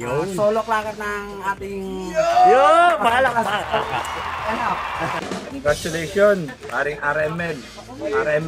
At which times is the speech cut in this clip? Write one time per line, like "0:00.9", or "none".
0:05.2